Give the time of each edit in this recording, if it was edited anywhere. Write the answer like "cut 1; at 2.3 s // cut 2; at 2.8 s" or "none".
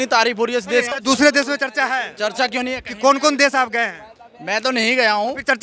cut 1; at 0.9 s